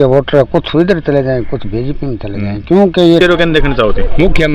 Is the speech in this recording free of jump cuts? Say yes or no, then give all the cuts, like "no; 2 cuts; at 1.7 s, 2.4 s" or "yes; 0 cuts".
no; 1 cut; at 3.2 s